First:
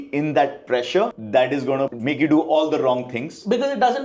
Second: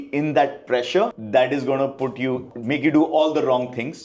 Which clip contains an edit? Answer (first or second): first